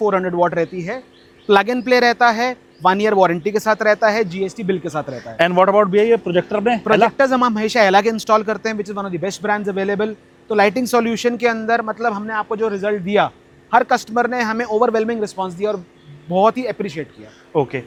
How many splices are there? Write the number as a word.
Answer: zero